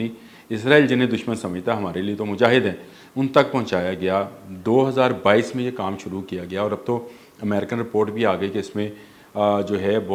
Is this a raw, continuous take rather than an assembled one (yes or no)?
yes